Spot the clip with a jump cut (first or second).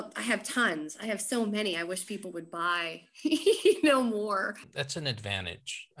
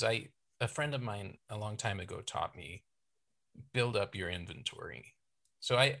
first